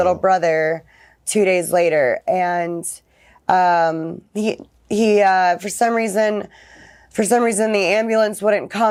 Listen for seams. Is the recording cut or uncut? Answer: uncut